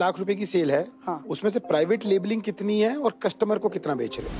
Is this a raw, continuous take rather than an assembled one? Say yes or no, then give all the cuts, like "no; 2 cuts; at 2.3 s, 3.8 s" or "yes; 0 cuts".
yes; 0 cuts